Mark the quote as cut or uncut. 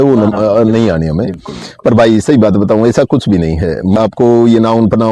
cut